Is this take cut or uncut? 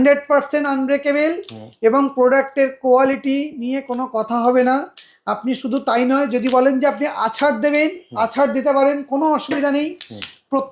uncut